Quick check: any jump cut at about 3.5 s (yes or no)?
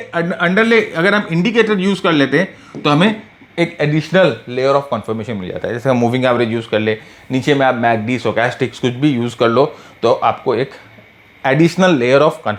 no